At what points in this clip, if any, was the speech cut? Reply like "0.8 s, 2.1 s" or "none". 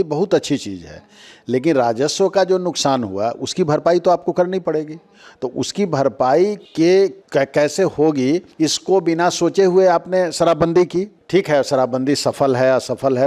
none